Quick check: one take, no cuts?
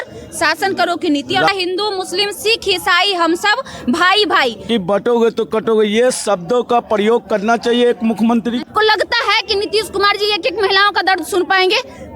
no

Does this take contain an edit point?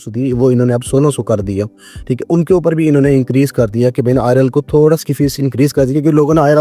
no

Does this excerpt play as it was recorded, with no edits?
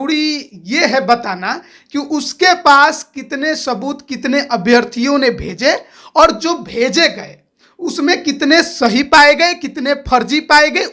yes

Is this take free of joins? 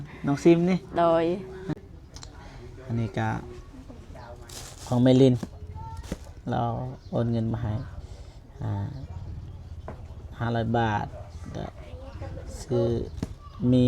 no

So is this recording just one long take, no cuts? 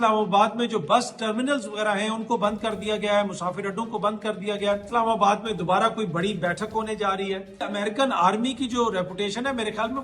no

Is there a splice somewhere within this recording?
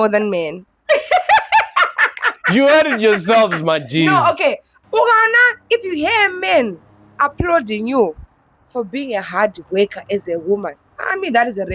yes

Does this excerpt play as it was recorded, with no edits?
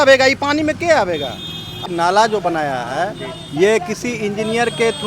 no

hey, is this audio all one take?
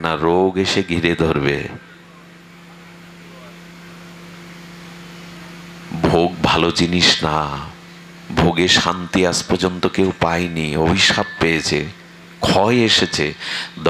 yes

